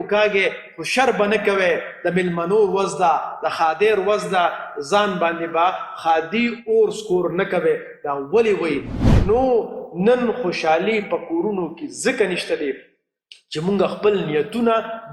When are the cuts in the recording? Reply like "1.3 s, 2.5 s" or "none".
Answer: 9.0 s